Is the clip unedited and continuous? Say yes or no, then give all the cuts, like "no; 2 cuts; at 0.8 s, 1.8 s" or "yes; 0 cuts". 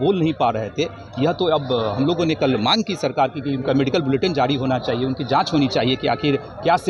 yes; 0 cuts